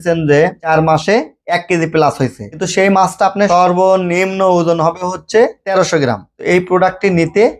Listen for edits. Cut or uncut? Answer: uncut